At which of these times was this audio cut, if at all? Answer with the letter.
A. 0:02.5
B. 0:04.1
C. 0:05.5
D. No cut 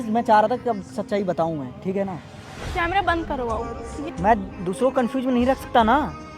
B